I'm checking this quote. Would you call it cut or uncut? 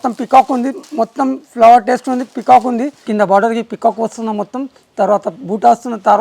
cut